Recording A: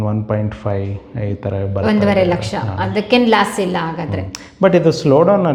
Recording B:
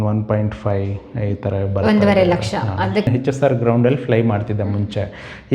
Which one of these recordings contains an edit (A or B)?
B